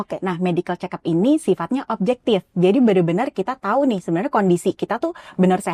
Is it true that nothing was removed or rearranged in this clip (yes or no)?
yes